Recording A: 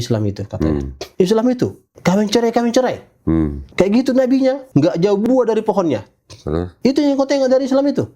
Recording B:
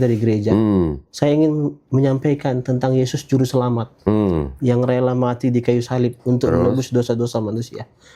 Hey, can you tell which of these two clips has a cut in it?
A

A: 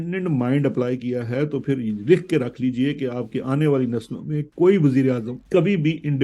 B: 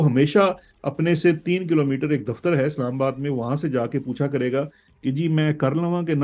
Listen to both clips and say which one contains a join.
A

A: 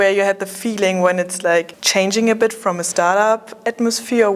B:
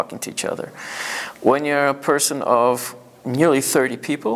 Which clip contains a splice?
A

